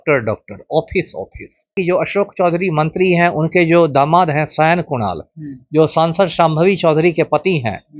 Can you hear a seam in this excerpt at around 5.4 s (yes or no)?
no